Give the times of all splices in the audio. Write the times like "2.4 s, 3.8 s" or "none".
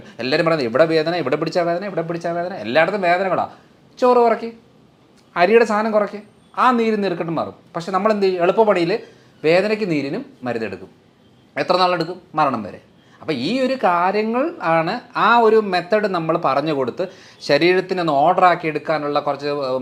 none